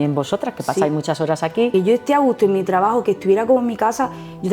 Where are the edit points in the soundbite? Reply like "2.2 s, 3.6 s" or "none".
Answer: 1.7 s